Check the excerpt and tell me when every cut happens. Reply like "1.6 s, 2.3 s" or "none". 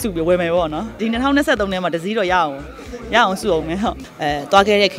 1.0 s, 4.1 s